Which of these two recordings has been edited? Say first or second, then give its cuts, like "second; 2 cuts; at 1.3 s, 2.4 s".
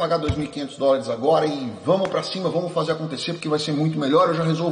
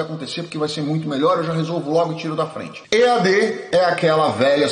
second; 1 cut; at 2.7 s